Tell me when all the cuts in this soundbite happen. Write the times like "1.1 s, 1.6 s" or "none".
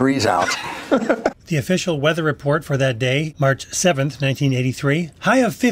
none

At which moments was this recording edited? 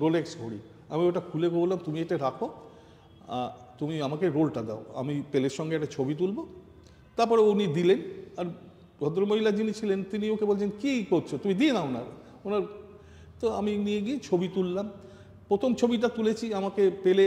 none

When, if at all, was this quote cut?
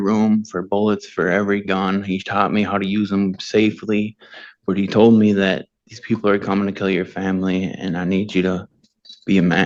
none

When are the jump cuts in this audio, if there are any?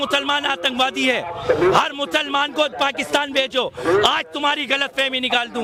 none

